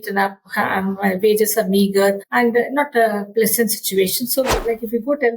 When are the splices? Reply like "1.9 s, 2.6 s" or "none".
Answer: 2.2 s, 4.6 s

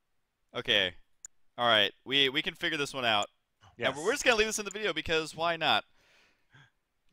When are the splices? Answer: 2.0 s

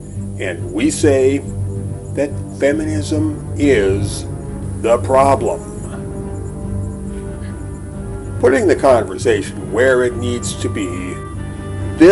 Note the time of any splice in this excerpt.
none

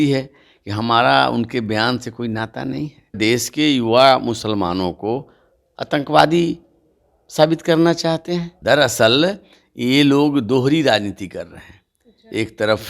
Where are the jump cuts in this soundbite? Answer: 3.2 s, 8.5 s

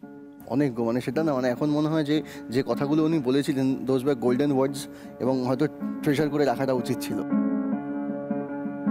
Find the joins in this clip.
none

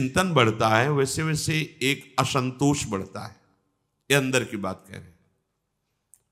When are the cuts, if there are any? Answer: none

